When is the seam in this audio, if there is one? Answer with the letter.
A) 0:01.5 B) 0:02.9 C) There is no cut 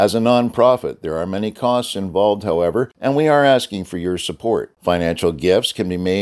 B